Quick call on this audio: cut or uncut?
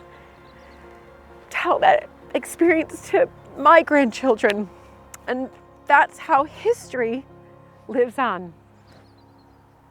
uncut